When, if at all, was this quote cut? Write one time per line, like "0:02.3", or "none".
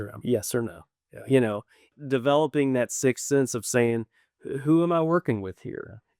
0:01.9